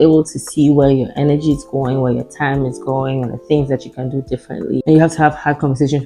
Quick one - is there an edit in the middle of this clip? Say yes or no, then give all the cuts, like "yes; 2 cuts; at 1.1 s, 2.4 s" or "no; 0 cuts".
no; 0 cuts